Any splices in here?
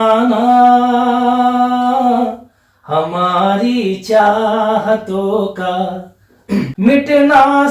yes; 1 cut; at 6.4 s

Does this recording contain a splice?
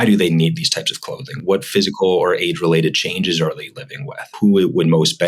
yes; 2 cuts; at 1.4 s, 4.3 s

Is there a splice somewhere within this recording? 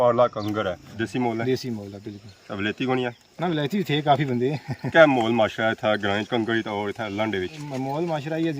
yes; 3 cuts; at 0.9 s, 4.9 s, 7.6 s

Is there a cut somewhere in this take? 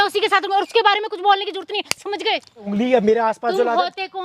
yes; 1 cut; at 2.7 s

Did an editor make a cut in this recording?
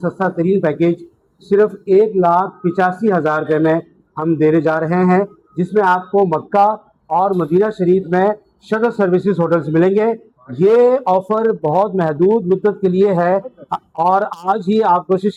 no; 0 cuts

